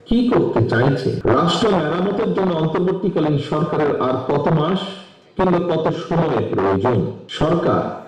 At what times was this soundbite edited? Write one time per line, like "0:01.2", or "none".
0:01.2
0:07.2